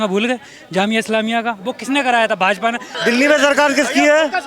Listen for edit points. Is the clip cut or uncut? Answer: cut